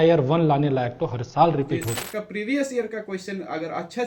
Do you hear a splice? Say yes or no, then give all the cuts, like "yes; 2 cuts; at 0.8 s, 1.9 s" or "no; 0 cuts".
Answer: yes; 1 cut; at 2.0 s